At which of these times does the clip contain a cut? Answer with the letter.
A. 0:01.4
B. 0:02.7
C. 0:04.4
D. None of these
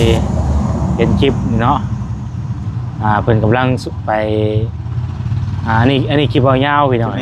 D